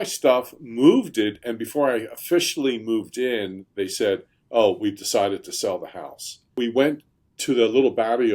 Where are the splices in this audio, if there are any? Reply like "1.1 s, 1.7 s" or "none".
6.6 s